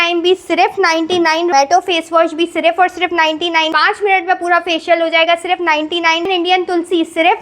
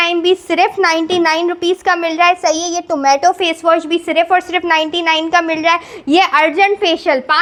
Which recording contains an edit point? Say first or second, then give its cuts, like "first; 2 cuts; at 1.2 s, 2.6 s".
first; 3 cuts; at 1.5 s, 3.7 s, 6.3 s